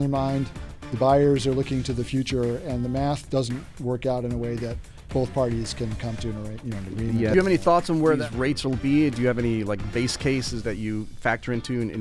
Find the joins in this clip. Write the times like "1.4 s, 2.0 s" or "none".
5.0 s, 7.3 s, 8.2 s, 10.6 s